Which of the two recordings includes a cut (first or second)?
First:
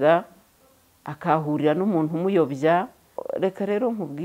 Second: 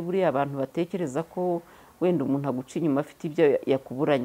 first